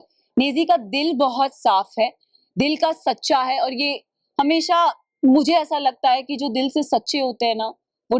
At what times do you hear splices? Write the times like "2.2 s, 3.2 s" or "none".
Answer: none